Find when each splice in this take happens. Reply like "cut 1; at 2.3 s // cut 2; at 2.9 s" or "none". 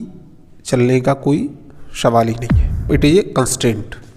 cut 1; at 2.9 s